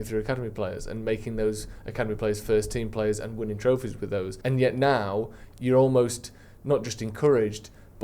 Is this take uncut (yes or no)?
no